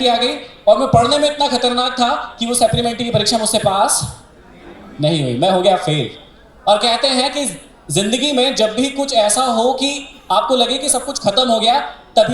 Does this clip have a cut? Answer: no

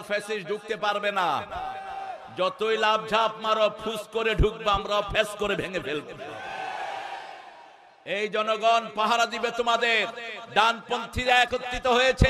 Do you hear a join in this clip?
no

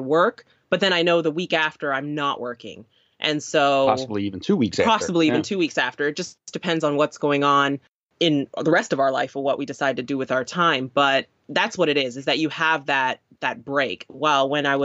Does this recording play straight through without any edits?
yes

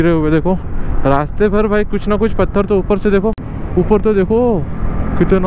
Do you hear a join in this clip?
no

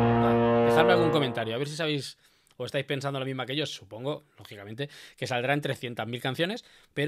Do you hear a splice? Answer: no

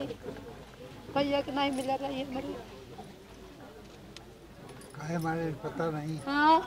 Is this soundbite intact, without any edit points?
yes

